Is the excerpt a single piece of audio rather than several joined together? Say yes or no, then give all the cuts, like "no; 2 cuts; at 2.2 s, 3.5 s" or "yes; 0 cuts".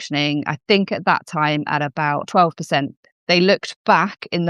no; 1 cut; at 2.3 s